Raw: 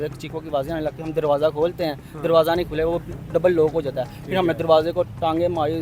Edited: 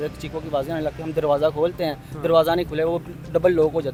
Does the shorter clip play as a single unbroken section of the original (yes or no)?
yes